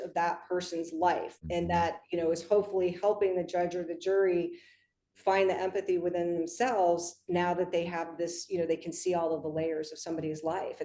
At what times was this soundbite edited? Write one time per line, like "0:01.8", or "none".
0:01.3

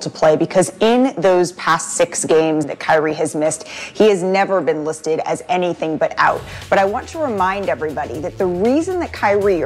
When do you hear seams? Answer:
0:02.7

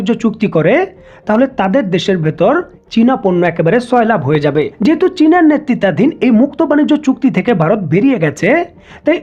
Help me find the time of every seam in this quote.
0:04.7

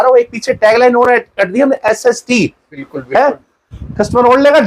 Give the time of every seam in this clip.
0:02.8

